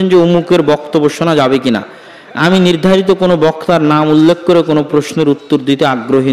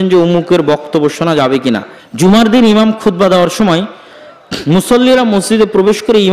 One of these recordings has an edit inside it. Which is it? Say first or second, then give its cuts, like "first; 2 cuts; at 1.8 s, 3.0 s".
second; 1 cut; at 2.0 s